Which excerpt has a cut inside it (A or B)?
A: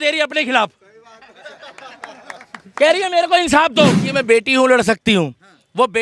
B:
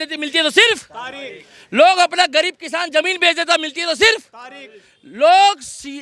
A